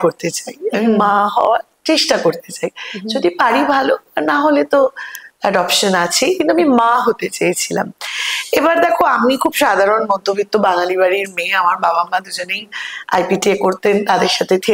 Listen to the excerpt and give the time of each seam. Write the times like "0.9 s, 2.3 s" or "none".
none